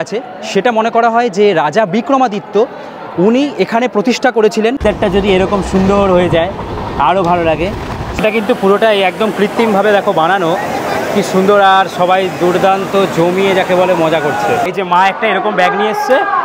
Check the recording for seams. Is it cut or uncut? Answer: cut